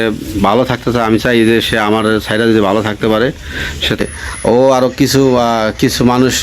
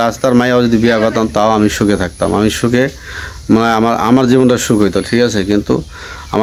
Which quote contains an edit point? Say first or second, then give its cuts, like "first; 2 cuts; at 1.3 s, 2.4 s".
first; 1 cut; at 4.0 s